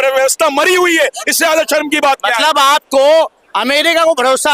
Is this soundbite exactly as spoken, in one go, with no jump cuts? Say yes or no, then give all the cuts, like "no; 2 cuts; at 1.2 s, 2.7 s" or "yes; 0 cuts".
yes; 0 cuts